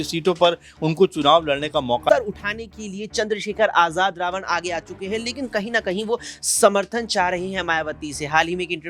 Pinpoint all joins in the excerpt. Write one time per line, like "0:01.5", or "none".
0:02.1

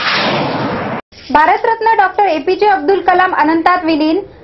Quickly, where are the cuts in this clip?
0:01.0

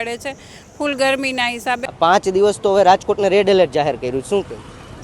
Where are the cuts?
0:01.8

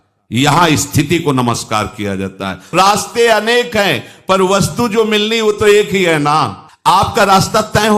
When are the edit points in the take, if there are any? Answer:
0:02.7
0:06.6

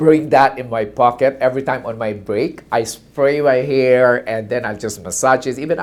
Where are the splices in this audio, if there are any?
none

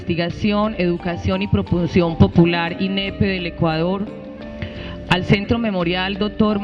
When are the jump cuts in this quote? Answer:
none

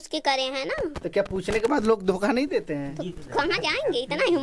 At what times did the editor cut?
none

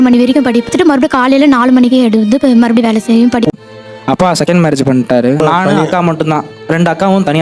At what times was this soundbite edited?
0:03.5

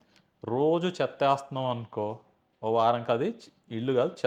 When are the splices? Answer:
none

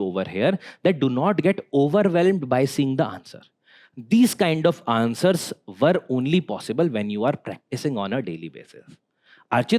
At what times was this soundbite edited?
none

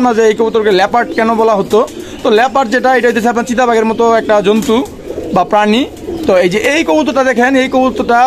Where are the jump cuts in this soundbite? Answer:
none

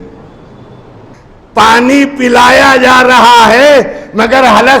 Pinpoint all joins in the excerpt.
0:01.1

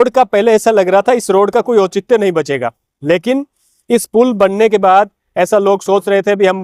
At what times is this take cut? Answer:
none

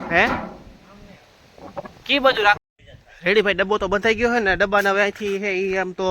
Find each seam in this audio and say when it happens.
0:02.7

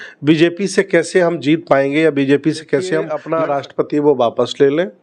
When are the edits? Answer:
0:03.2

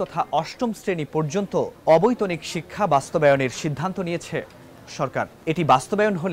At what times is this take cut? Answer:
0:01.8
0:05.4

